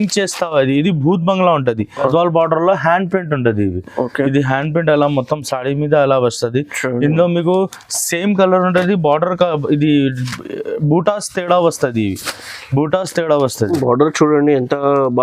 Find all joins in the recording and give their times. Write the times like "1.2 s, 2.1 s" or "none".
2.1 s